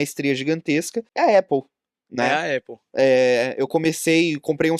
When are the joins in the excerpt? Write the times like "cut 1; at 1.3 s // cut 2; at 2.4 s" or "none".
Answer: cut 1; at 1.0 s